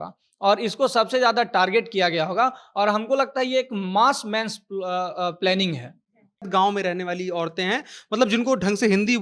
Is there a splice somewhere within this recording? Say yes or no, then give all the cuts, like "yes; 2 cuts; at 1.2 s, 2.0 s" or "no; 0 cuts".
yes; 1 cut; at 6.5 s